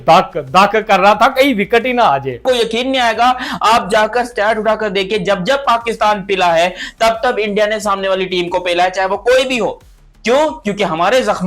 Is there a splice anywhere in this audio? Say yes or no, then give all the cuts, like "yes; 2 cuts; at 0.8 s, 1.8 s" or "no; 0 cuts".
yes; 1 cut; at 2.4 s